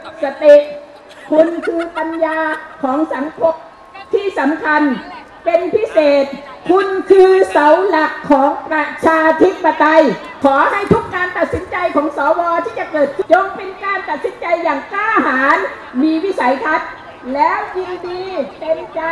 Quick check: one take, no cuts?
no; 2 cuts; at 10.3 s, 13.2 s

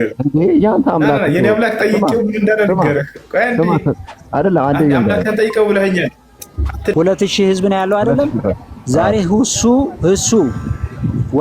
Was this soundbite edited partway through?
yes; 1 cut; at 6.9 s

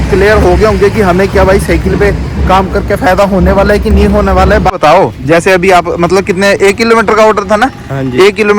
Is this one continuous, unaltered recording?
no; 1 cut; at 4.8 s

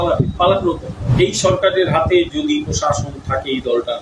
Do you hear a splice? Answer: yes; 1 cut; at 1.1 s

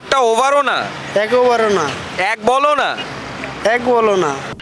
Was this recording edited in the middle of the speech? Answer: no; 0 cuts

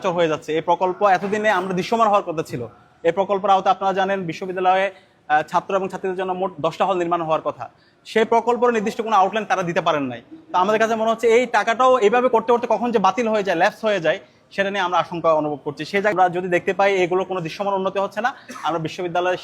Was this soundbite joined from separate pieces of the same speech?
yes; 1 cut; at 16.1 s

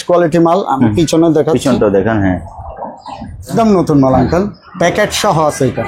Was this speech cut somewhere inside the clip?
yes; 1 cut; at 3.5 s

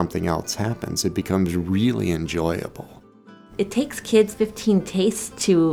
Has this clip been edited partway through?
yes; 2 cuts; at 3.5 s, 4.3 s

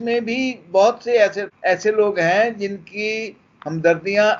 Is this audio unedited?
no; 1 cut; at 1.5 s

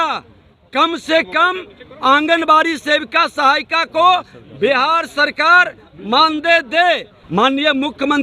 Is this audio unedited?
no; 1 cut; at 7.1 s

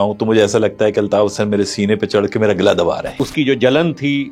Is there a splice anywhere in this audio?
yes; 1 cut; at 3.2 s

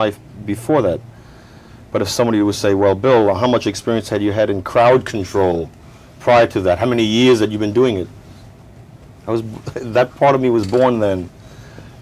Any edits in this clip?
yes; 1 cut; at 4.6 s

